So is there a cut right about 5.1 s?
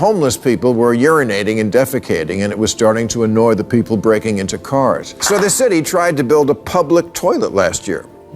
yes; 1 cut; at 5.1 s

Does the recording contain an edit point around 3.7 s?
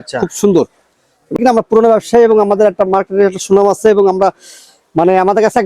no; 1 cut; at 1.4 s

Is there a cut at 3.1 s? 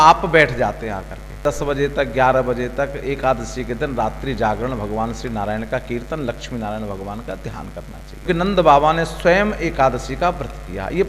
no; 2 cuts; at 1.4 s, 8.2 s

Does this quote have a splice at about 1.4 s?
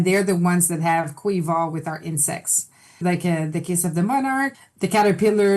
no; 2 cuts; at 3.0 s, 4.5 s

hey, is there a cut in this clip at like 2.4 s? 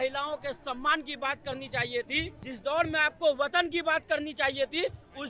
yes; 1 cut; at 2.4 s

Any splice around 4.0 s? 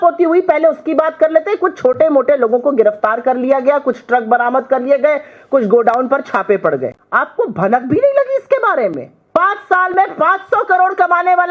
no; 2 cuts; at 7.0 s, 9.1 s

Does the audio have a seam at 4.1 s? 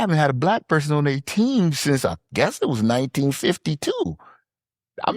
no; 0 cuts

